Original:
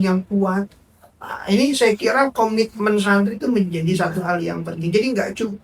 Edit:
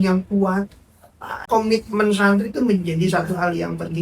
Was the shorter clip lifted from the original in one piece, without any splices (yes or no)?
no